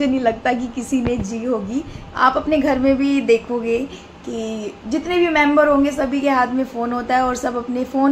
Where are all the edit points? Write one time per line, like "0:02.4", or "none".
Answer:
0:02.0